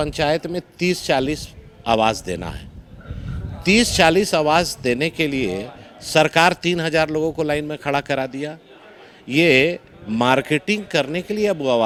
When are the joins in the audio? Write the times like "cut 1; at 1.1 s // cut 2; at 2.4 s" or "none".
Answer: none